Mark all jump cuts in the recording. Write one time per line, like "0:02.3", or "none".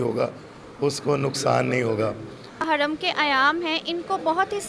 0:02.6

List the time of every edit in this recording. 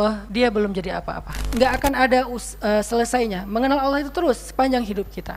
0:01.4

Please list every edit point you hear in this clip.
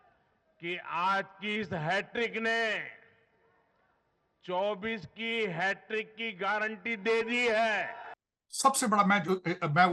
0:08.0

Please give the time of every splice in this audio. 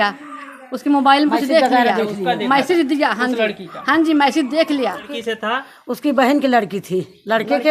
0:05.2

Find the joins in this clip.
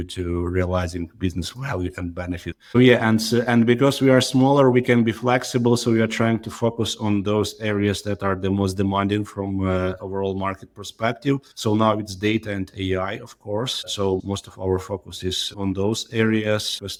none

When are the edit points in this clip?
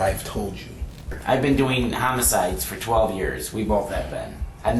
0:01.2

